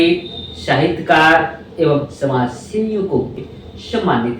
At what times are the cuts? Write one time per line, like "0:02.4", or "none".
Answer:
0:03.4